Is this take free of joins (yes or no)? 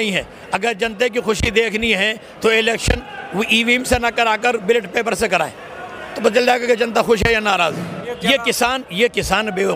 no